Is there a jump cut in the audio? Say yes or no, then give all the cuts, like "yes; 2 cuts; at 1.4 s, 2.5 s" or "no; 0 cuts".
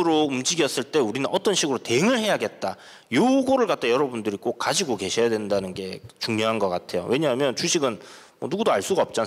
no; 0 cuts